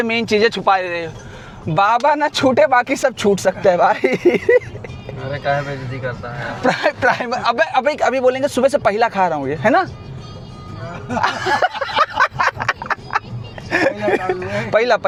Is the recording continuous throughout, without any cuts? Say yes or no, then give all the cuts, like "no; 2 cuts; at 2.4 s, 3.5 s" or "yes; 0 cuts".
yes; 0 cuts